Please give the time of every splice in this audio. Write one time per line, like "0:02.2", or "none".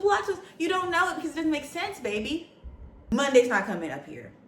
0:03.1